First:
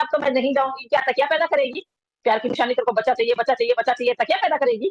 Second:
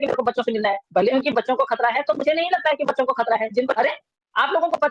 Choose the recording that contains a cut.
second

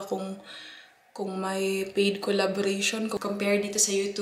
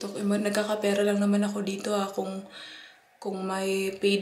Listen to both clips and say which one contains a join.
first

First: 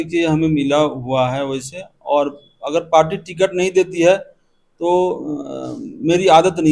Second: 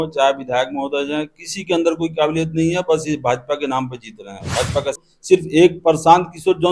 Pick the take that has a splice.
second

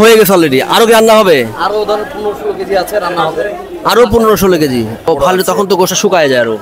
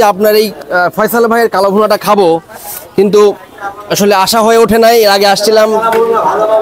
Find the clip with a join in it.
first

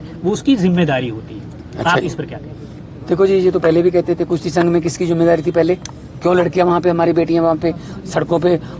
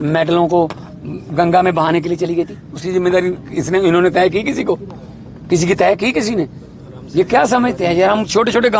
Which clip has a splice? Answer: second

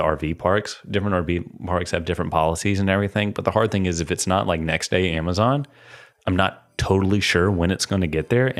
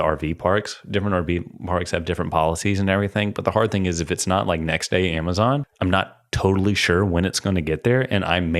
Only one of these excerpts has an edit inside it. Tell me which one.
second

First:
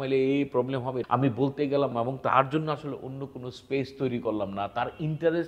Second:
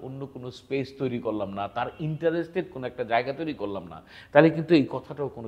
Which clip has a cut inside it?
first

